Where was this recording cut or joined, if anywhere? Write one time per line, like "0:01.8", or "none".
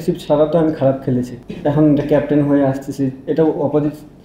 0:01.4